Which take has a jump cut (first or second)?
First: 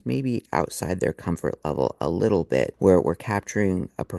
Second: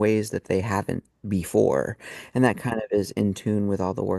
first